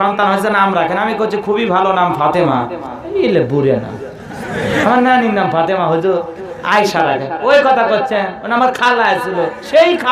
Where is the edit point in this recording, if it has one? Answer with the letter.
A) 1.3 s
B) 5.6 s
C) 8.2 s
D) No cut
D